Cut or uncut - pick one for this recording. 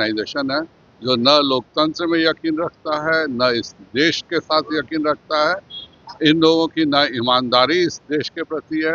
uncut